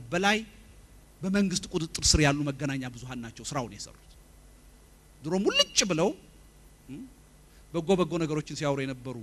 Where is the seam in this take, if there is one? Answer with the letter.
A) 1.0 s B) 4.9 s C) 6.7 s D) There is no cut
B